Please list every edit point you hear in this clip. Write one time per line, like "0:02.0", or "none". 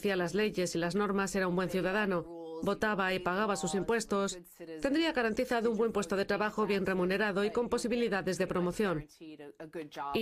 0:04.2